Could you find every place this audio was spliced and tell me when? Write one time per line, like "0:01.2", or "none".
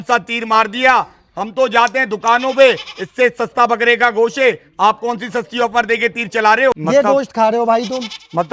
0:06.8